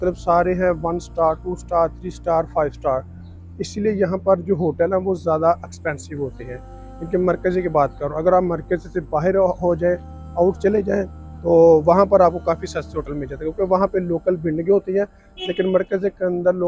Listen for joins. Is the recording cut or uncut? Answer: uncut